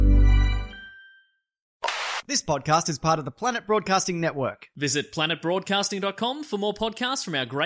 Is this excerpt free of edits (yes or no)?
no